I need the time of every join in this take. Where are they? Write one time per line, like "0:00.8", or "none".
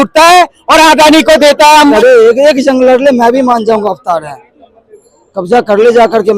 0:01.9